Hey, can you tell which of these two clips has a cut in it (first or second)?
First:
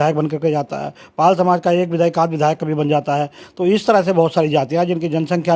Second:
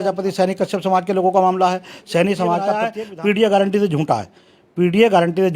second